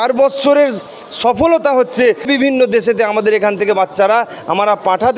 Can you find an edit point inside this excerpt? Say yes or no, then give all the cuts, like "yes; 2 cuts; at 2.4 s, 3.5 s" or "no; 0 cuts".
yes; 1 cut; at 2.3 s